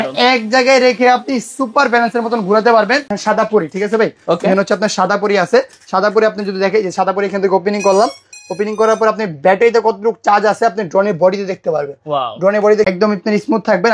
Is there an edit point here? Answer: yes; 2 cuts; at 3.1 s, 12.9 s

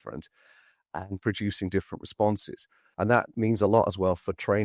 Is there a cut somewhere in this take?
yes; 1 cut; at 3.2 s

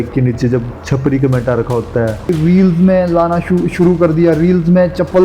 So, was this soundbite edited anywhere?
yes; 1 cut; at 2.3 s

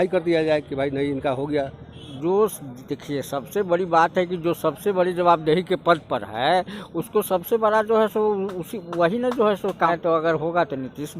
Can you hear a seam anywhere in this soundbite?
yes; 2 cuts; at 2.1 s, 9.9 s

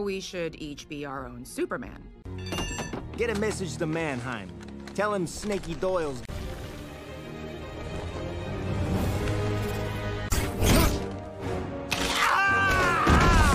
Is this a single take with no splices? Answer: yes; 0 cuts

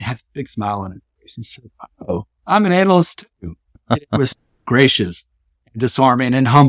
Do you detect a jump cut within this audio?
no; 0 cuts

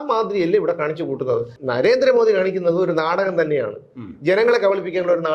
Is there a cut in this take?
yes; 1 cut; at 1.5 s

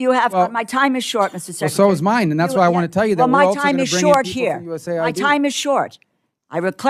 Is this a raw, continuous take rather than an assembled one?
yes; 0 cuts

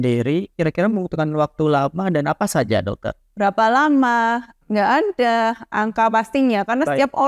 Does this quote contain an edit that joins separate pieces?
yes; 1 cut; at 3.2 s

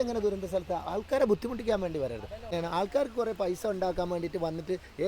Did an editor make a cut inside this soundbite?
yes; 1 cut; at 2.5 s

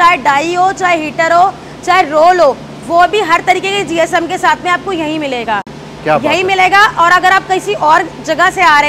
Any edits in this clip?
no; 0 cuts

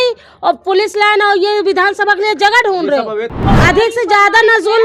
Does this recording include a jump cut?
yes; 1 cut; at 3.4 s

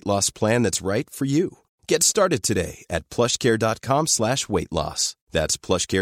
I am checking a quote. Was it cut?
no; 0 cuts

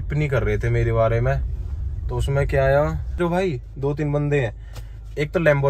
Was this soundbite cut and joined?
yes; 1 cut; at 3.2 s

